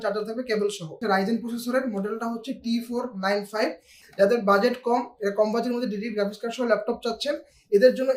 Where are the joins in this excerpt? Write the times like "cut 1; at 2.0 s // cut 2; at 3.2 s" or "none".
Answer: cut 1; at 1.0 s // cut 2; at 3.9 s